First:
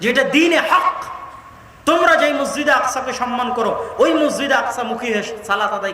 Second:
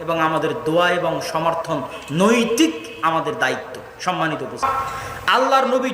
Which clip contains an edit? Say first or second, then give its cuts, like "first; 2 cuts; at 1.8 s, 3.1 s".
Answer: second; 1 cut; at 4.5 s